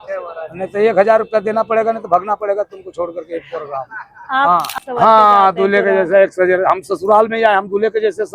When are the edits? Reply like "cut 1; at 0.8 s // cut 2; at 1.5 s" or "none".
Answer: cut 1; at 4.8 s